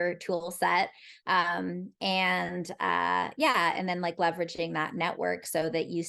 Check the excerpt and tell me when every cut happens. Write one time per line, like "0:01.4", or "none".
none

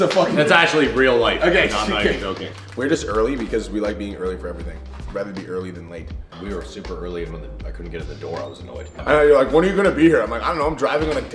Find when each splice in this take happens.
none

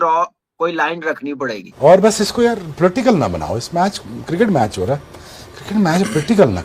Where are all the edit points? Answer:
0:01.8

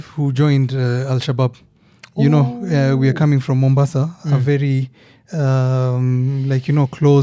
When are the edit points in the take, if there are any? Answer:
none

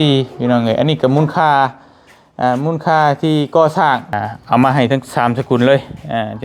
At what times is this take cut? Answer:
0:04.1

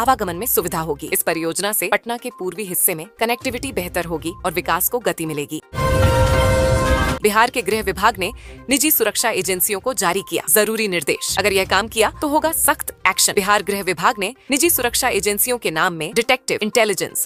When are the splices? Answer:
none

